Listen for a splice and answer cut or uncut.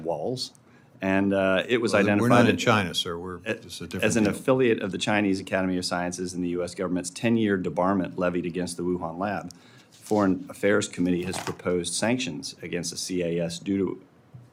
uncut